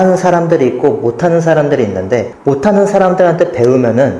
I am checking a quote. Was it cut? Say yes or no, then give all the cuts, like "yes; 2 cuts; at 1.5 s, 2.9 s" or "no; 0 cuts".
yes; 1 cut; at 2.3 s